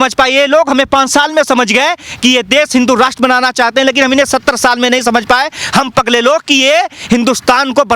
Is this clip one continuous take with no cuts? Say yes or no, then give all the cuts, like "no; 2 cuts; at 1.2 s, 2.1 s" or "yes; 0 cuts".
yes; 0 cuts